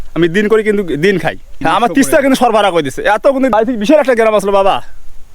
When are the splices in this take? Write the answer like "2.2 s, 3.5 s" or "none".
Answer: 1.6 s, 3.3 s